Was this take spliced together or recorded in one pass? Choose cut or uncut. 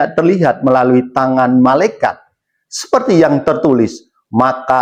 uncut